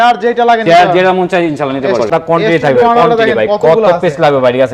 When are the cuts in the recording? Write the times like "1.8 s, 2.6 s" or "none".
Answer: 2.1 s